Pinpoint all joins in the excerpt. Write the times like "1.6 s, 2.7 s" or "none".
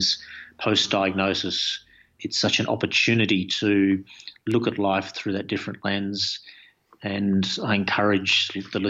2.2 s